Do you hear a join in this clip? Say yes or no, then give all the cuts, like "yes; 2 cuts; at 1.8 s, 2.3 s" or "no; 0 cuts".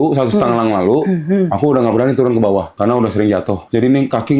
yes; 2 cuts; at 2.7 s, 3.6 s